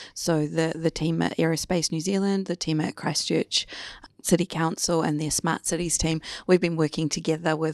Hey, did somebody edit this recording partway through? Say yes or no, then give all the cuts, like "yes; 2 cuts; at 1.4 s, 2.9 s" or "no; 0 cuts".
no; 0 cuts